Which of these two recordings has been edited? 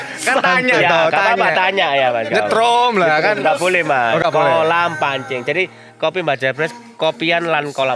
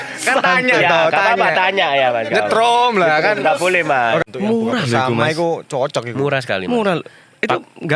second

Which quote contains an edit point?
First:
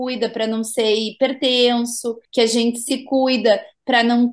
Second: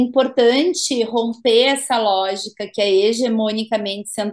first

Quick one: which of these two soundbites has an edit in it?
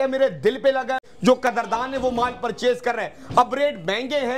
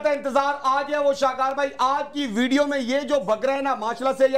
first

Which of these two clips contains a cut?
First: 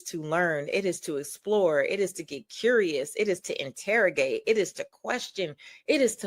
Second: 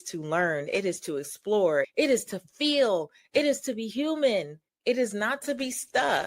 second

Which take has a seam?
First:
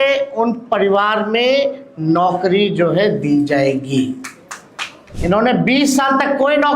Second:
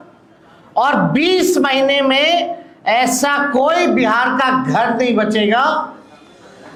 first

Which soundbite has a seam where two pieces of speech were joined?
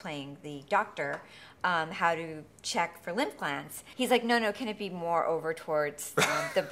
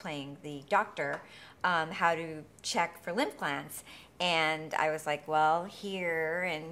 first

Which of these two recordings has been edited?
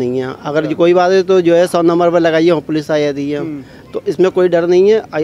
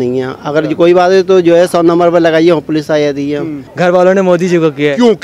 second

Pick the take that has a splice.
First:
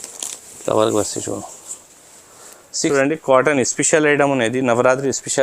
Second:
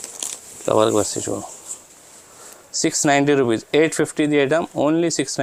first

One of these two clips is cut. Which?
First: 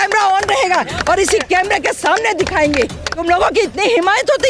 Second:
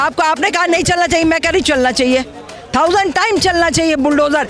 first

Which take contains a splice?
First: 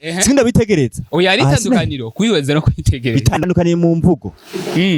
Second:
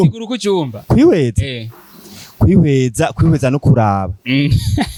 first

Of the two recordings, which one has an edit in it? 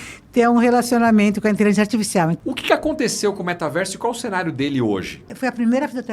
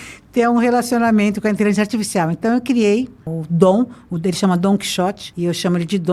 first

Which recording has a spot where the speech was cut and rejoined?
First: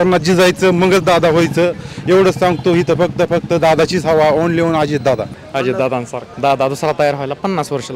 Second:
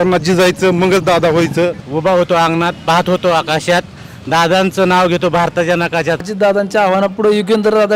second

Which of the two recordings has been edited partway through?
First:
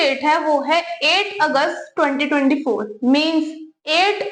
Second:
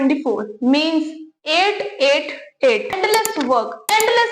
second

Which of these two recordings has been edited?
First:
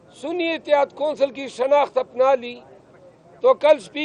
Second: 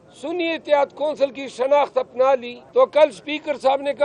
second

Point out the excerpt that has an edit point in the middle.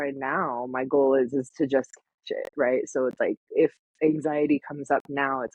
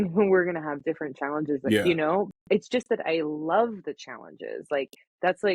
second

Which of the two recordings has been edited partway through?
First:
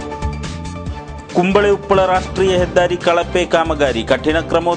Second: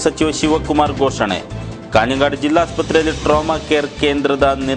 first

